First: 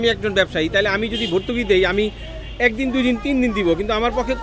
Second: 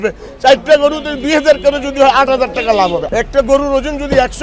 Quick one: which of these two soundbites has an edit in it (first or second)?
second